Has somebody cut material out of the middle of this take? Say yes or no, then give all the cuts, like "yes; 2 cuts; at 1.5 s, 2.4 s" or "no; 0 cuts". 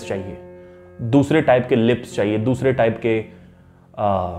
no; 0 cuts